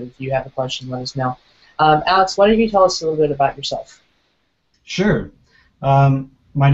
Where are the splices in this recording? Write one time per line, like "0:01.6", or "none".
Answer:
0:03.0